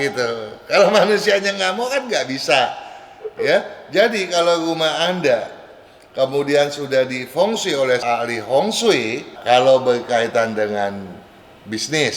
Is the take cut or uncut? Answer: cut